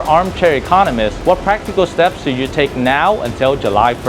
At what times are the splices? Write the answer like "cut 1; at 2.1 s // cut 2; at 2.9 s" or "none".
cut 1; at 1.2 s